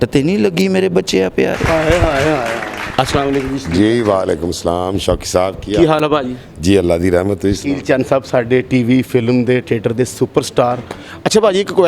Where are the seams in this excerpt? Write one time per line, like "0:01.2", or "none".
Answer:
none